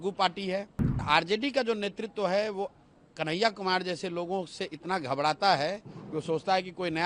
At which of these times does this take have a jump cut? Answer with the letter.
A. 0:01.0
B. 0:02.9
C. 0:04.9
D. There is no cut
A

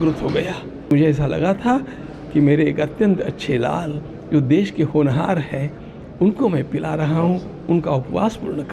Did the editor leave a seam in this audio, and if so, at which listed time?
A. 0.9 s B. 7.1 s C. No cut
A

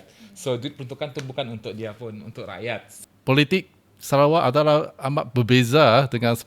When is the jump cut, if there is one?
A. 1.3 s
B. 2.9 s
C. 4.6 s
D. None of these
B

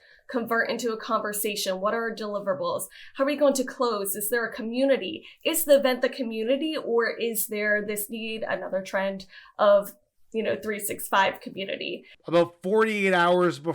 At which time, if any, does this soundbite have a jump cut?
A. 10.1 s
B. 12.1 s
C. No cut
B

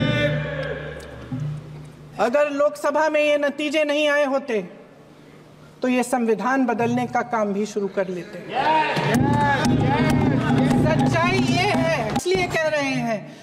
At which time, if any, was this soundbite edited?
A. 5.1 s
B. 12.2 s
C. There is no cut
B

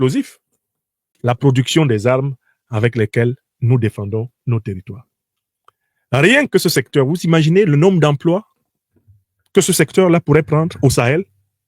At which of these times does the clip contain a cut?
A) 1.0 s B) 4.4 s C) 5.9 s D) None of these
A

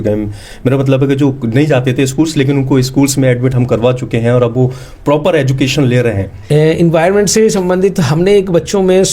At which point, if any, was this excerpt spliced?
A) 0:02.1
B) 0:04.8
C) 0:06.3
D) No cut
C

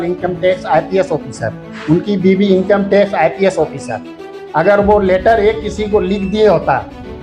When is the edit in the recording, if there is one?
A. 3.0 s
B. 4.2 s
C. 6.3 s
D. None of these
D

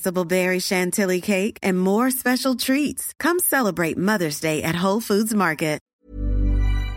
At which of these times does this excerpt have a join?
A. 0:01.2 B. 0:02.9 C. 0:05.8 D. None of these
C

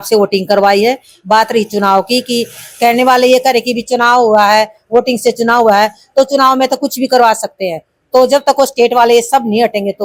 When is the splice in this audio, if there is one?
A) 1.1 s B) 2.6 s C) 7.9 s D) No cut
D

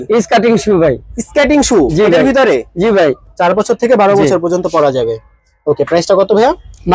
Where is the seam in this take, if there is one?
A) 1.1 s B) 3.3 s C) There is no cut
B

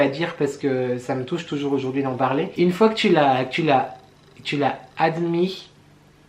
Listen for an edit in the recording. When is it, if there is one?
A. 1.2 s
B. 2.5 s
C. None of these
B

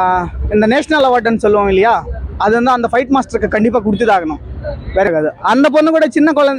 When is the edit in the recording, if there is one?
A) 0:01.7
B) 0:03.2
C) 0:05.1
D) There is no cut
C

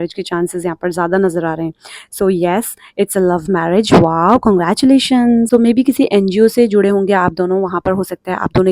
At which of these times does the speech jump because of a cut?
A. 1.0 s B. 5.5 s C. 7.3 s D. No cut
B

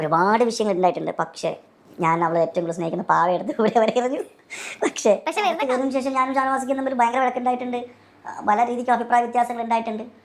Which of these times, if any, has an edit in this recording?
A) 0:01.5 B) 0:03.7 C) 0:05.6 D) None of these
C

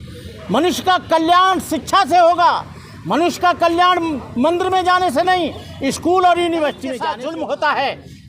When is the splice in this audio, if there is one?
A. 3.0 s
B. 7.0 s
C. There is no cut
B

